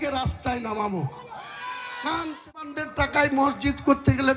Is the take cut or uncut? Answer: cut